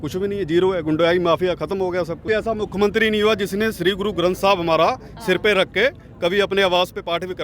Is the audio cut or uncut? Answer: cut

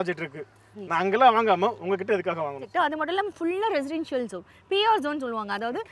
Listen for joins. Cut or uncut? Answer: cut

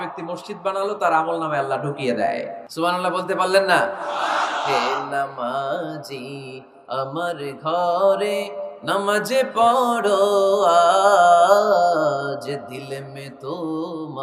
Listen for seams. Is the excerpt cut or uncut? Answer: cut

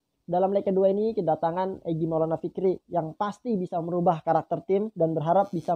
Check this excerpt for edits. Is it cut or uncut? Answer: uncut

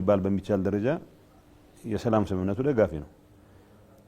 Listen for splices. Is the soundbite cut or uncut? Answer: uncut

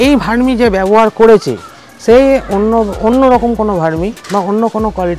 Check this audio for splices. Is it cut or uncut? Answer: uncut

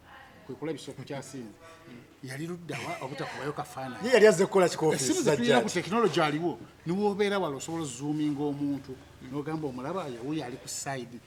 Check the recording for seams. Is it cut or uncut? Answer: uncut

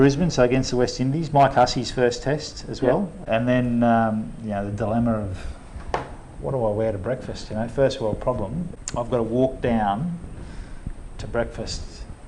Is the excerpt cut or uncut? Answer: cut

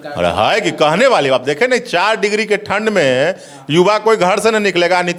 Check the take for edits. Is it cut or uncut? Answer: uncut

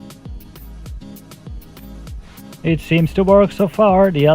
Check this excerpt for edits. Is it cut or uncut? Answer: cut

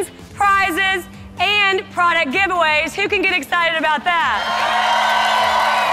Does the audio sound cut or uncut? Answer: uncut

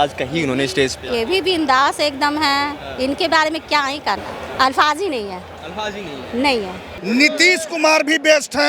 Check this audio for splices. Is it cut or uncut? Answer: cut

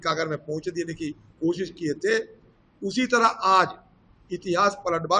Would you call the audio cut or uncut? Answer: uncut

